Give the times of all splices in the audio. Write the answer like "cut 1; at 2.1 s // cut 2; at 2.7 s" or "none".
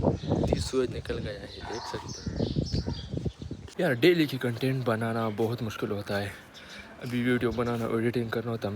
cut 1; at 3.7 s